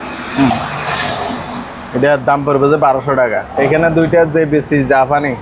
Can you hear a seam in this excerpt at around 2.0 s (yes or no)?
no